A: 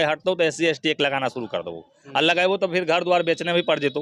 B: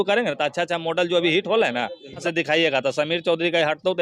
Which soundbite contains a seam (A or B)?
B